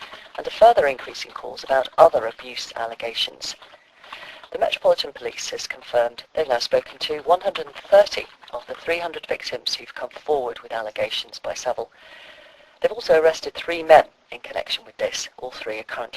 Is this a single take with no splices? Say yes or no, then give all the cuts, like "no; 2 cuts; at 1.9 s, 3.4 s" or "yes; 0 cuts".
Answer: no; 1 cut; at 9.7 s